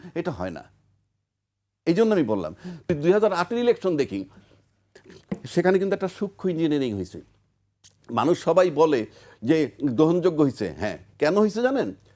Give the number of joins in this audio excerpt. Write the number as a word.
one